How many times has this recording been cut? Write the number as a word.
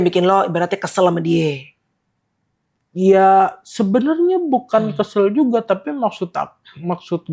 zero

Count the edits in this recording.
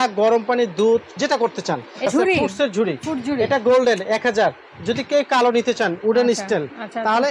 one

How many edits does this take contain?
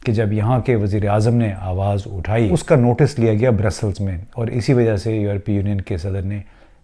one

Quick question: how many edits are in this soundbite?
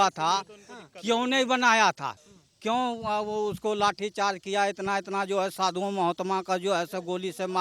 one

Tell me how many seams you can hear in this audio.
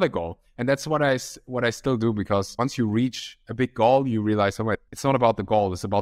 two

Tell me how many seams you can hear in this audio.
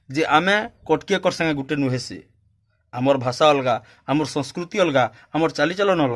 zero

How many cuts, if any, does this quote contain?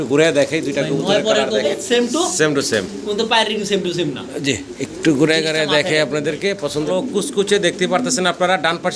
two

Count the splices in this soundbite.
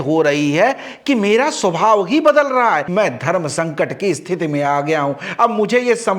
one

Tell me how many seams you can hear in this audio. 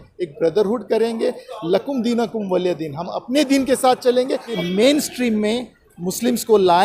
one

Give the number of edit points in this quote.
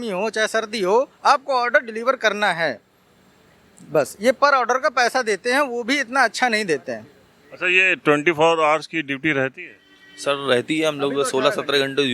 zero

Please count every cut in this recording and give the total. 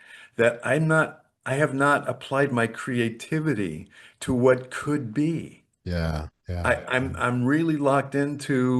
zero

